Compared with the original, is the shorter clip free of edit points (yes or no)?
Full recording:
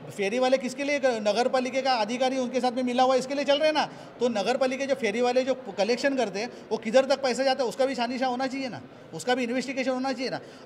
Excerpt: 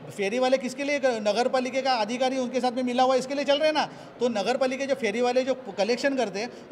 yes